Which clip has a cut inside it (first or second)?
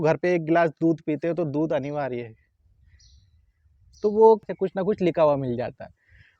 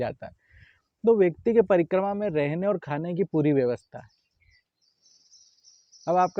first